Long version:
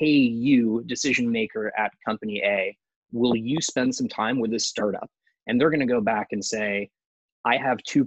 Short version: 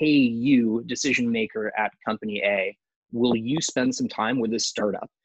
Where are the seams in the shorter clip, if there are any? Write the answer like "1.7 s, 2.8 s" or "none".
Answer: none